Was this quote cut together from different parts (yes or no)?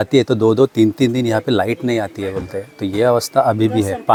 no